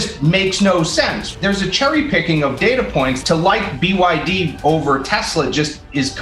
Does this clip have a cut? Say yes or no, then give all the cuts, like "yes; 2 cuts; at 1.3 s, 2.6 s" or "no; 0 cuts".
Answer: yes; 2 cuts; at 1.2 s, 3.2 s